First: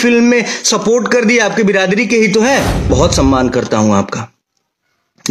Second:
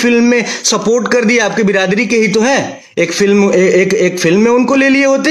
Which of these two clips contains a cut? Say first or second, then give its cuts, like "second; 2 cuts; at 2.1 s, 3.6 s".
first; 1 cut; at 2.9 s